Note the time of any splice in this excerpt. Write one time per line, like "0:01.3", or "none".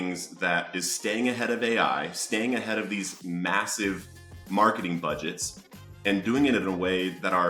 none